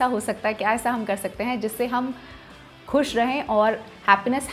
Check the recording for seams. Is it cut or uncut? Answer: uncut